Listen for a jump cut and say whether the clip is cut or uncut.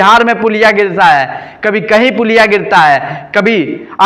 uncut